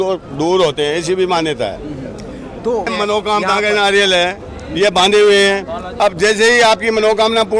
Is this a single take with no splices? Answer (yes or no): no